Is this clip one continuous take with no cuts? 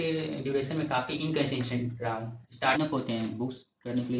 no; 1 cut; at 2.8 s

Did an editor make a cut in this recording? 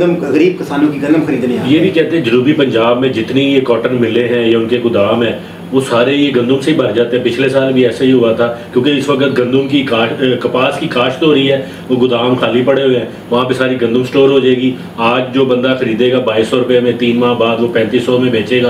no; 0 cuts

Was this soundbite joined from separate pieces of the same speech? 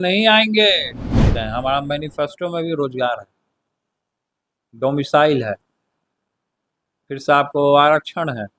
yes; 1 cut; at 1.3 s

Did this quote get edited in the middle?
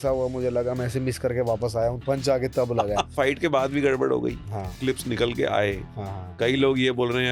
yes; 3 cuts; at 2.0 s, 3.1 s, 4.8 s

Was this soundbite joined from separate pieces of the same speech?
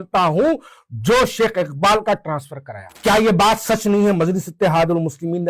yes; 1 cut; at 2.9 s

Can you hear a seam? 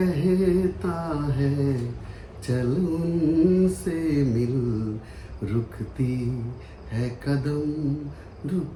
no; 0 cuts

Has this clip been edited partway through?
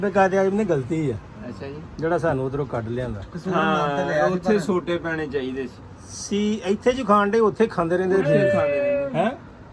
no; 0 cuts

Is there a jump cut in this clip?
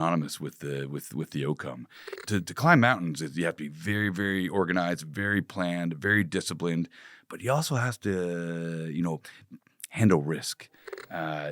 yes; 1 cut; at 2.1 s

